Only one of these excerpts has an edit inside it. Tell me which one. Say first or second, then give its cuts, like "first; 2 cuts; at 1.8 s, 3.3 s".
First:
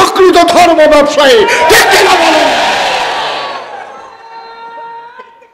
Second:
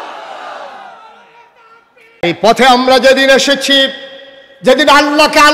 second; 1 cut; at 2.2 s